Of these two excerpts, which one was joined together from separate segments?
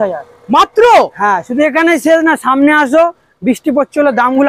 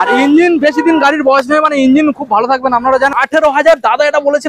second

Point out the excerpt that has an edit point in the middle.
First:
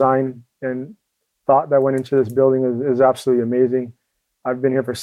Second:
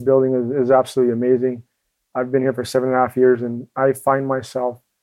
second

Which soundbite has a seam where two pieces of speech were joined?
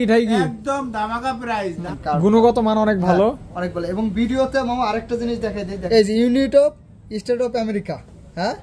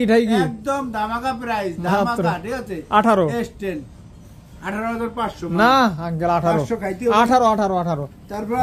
first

